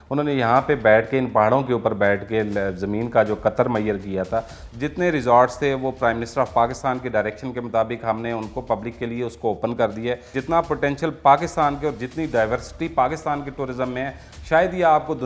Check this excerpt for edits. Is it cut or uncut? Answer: cut